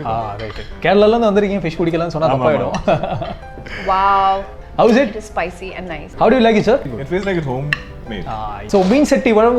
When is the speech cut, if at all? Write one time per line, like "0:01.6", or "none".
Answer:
0:04.6
0:06.0
0:06.9
0:08.6